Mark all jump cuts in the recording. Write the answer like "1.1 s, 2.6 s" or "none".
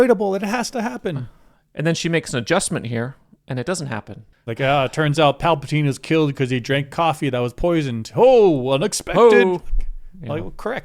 4.2 s